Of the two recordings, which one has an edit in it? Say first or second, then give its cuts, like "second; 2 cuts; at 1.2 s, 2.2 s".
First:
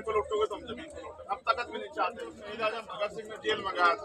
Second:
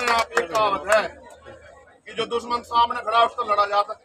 first; 1 cut; at 2.5 s